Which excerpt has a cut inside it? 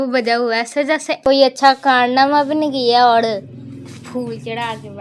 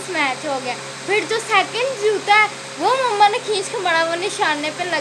first; 1 cut; at 1.2 s

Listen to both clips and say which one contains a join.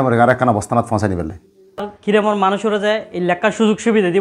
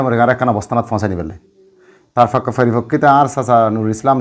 first; 1 cut; at 1.9 s

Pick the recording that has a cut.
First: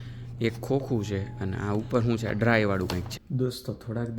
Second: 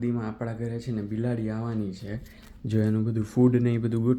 first; 1 cut; at 3.1 s

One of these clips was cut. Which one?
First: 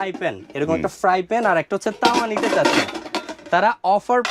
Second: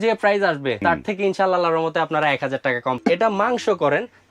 second; 2 cuts; at 0.8 s, 3.0 s

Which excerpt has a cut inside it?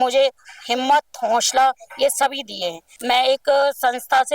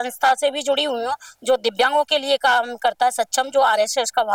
first; 1 cut; at 2.9 s

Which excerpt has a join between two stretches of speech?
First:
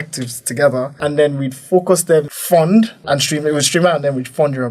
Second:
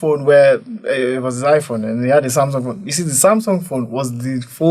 first; 3 cuts; at 0.9 s, 2.4 s, 3.0 s

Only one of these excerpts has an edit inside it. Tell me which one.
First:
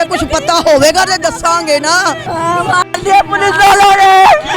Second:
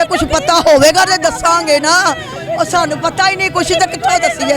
first; 1 cut; at 2.2 s

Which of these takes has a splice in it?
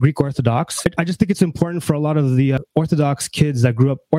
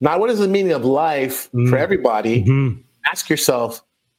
first; 2 cuts; at 0.9 s, 2.6 s

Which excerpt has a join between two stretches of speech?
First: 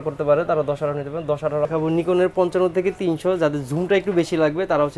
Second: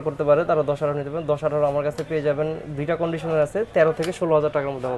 first; 1 cut; at 1.7 s

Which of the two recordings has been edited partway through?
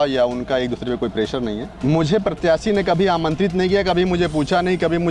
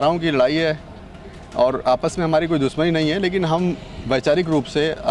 first; 1 cut; at 1.7 s

